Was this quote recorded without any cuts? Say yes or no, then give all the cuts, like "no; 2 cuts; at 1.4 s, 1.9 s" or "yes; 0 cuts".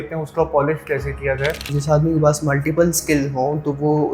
no; 1 cut; at 1.7 s